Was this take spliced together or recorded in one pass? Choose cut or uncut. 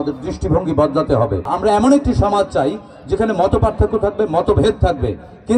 cut